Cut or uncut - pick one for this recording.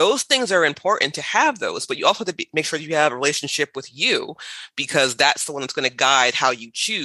uncut